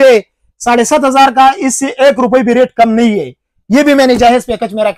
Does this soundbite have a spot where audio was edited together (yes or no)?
no